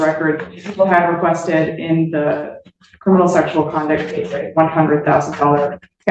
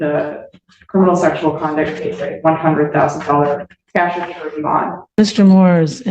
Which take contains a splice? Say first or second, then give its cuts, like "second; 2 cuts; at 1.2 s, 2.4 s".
second; 1 cut; at 5.0 s